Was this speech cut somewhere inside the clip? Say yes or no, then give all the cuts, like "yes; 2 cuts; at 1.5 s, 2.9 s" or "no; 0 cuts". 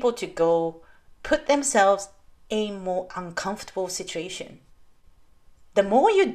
no; 0 cuts